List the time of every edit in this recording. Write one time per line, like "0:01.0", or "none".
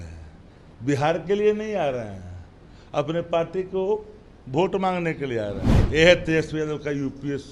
0:05.7